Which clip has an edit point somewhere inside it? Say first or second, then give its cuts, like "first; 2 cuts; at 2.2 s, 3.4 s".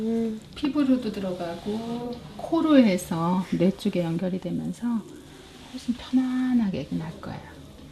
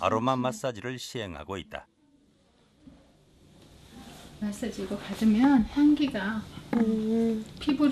first; 1 cut; at 2.6 s